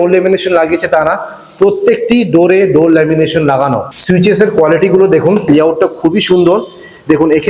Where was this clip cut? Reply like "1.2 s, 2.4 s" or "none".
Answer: 3.9 s, 5.4 s